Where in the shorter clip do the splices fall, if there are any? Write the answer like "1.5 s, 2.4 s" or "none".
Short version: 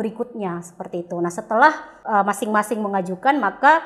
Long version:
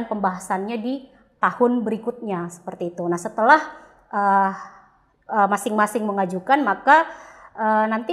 1.9 s